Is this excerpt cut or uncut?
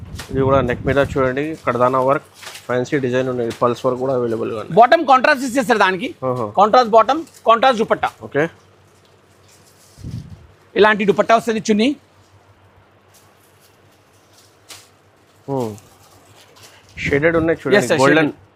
uncut